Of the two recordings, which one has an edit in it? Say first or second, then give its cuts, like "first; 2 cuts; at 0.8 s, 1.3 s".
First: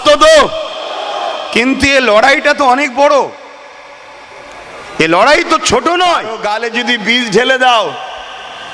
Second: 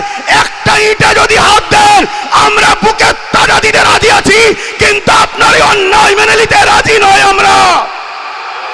first; 1 cut; at 6.5 s